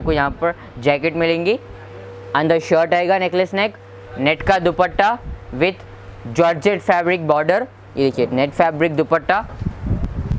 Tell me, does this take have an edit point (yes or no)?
no